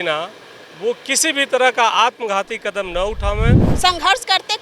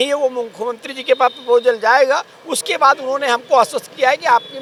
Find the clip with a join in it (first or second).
first